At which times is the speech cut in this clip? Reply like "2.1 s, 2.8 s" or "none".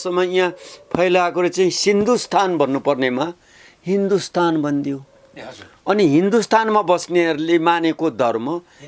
none